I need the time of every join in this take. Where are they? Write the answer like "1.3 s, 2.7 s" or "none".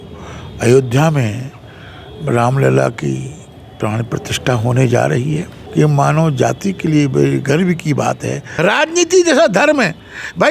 5.6 s, 8.4 s